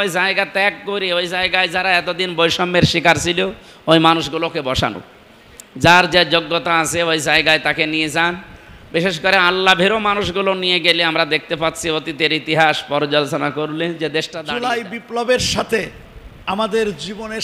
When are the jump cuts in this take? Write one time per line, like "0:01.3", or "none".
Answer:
0:14.4